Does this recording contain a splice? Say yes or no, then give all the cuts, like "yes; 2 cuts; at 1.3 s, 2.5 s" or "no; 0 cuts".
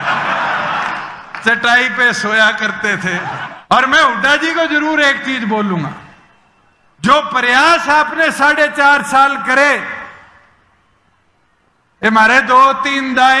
yes; 1 cut; at 3.5 s